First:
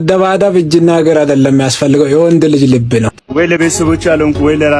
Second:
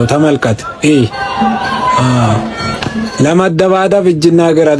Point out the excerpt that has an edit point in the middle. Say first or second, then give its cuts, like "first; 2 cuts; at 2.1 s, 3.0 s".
first; 1 cut; at 3.1 s